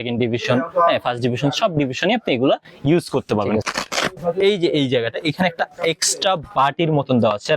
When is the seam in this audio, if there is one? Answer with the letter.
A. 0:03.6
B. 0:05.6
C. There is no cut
A